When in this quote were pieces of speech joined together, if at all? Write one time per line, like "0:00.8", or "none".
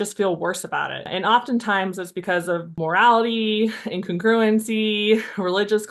0:01.1
0:02.7